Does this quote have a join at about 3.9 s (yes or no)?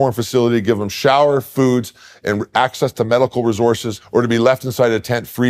yes